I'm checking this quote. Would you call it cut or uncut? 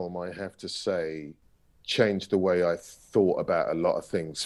uncut